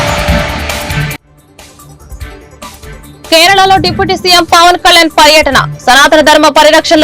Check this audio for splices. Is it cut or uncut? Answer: cut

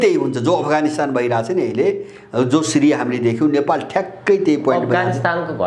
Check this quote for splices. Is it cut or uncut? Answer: uncut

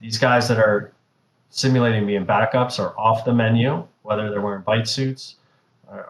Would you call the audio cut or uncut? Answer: uncut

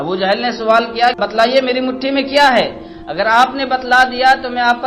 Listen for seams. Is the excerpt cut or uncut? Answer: cut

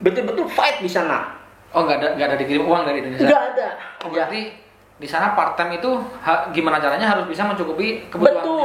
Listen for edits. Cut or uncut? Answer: uncut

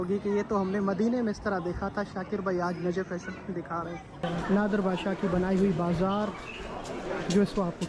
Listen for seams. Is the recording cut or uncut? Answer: cut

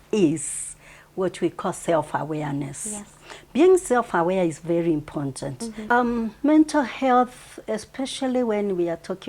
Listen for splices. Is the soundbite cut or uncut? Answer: cut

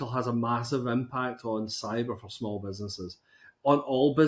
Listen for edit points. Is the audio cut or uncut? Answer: uncut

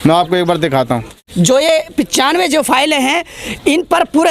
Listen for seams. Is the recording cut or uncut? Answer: cut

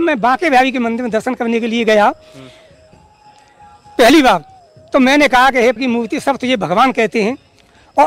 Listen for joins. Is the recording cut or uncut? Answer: uncut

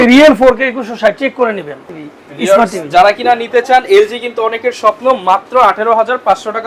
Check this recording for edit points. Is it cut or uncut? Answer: cut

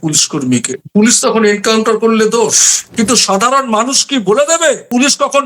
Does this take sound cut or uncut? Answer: cut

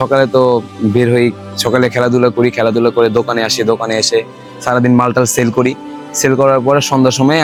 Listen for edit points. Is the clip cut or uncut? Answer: uncut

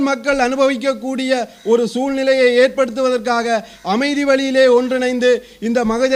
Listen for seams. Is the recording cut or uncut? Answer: uncut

